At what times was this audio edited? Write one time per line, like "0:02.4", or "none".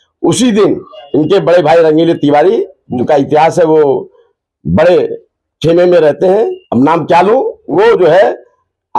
0:00.9
0:02.8
0:06.6
0:07.6